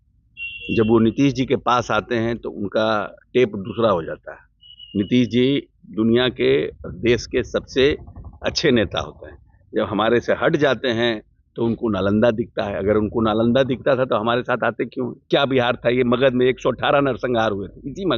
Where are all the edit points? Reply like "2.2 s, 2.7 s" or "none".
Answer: 15.2 s